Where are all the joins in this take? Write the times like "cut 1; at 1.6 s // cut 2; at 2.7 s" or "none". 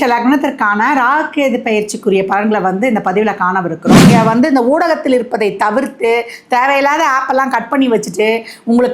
cut 1; at 3.9 s